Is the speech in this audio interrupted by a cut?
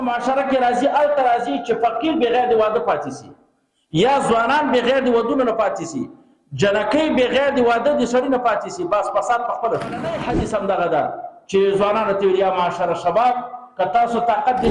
yes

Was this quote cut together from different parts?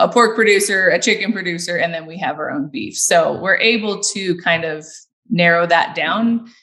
no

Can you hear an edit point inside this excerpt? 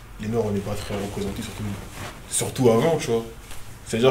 no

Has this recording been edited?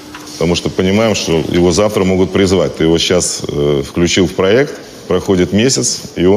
no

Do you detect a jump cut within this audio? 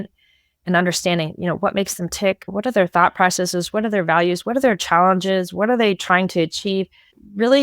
yes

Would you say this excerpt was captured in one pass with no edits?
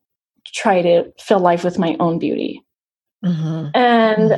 yes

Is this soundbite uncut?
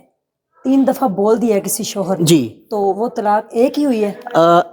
yes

